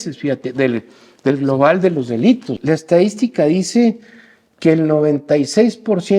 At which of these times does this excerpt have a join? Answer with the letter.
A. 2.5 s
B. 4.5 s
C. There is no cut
A